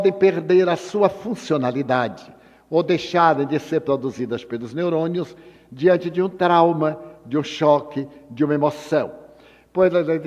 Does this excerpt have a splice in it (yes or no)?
yes